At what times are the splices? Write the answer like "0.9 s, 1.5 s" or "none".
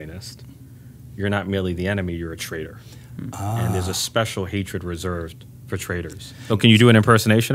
6.4 s